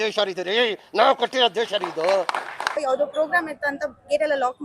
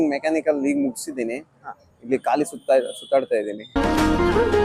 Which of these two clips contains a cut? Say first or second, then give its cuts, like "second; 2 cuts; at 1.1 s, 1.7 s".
first; 1 cut; at 2.8 s